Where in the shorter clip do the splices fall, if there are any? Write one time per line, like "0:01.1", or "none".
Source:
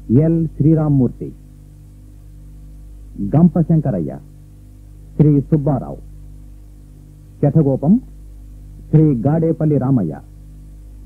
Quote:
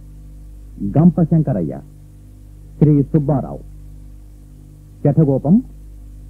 none